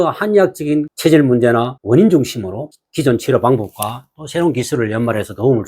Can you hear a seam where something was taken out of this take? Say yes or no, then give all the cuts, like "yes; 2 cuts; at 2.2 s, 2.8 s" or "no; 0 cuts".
yes; 3 cuts; at 0.9 s, 1.8 s, 2.7 s